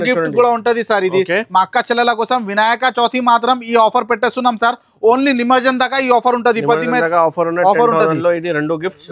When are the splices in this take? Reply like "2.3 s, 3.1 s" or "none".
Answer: none